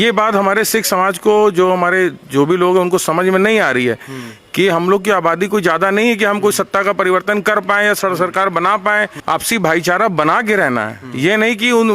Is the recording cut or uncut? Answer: cut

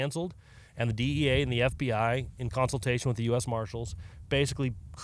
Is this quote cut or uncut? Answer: uncut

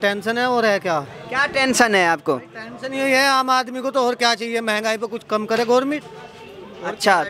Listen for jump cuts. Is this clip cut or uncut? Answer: uncut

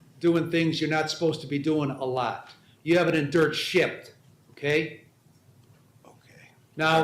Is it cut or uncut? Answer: cut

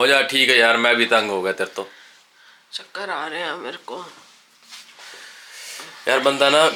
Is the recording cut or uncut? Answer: uncut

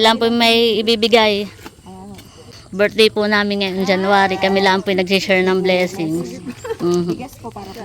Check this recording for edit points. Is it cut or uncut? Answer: cut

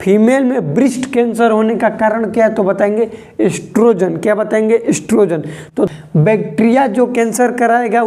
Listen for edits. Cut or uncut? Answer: cut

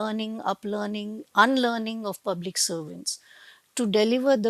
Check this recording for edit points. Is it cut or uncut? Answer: uncut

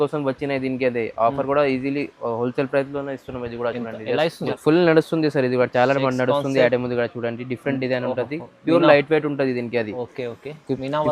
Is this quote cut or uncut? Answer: cut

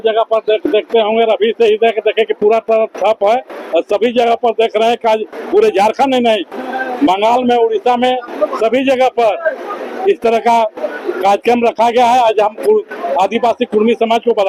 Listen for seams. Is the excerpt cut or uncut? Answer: uncut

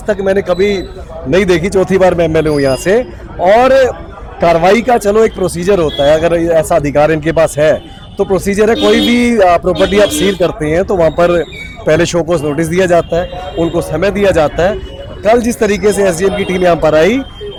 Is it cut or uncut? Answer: uncut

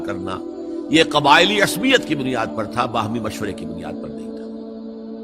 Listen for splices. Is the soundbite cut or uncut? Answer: cut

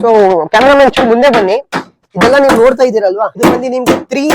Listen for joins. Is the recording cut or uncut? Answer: cut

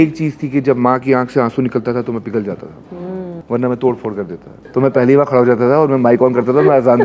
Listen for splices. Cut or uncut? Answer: cut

